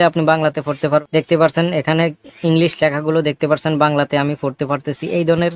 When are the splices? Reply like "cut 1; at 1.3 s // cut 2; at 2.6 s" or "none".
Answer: cut 1; at 1.1 s